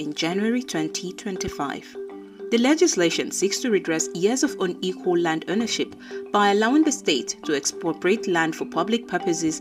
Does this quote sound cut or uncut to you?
uncut